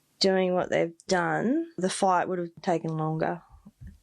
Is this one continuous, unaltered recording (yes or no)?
no